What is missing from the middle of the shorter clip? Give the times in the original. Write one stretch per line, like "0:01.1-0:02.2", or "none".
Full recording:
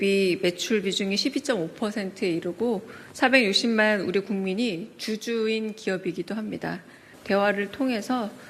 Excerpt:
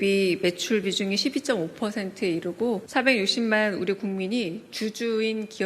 0:02.9-0:03.1